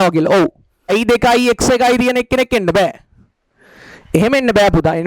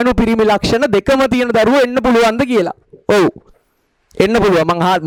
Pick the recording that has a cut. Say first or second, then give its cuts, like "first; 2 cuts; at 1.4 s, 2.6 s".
first; 1 cut; at 0.9 s